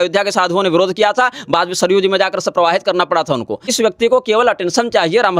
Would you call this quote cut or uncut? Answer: cut